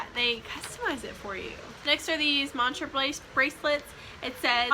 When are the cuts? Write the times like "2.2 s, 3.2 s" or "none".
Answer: none